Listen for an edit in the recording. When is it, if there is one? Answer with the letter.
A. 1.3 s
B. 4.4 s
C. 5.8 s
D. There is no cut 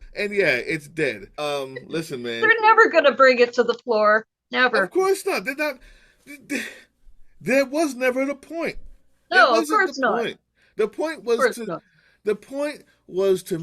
A